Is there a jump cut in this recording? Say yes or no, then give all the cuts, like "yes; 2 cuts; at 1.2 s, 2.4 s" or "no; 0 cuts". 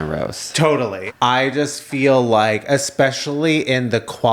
yes; 1 cut; at 1.0 s